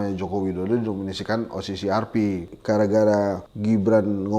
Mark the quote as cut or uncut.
cut